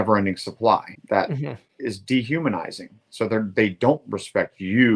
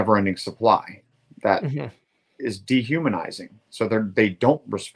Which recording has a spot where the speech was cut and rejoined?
first; 1 cut; at 1.3 s

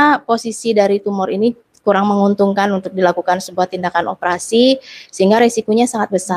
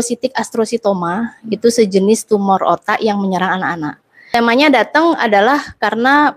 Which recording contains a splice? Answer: second; 1 cut; at 4.3 s

